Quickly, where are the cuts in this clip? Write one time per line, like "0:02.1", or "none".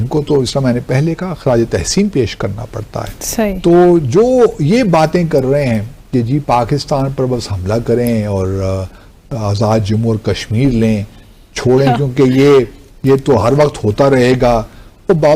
none